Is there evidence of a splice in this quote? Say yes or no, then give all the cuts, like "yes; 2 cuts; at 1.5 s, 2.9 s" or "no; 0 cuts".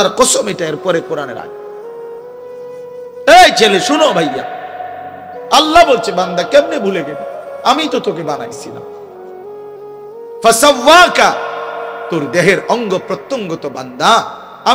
yes; 4 cuts; at 1.4 s, 3.3 s, 8.7 s, 10.4 s